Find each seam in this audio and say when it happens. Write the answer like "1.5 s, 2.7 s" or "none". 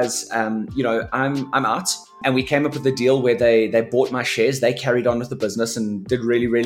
2.2 s